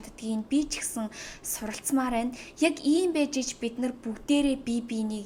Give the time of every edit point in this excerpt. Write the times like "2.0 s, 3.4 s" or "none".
none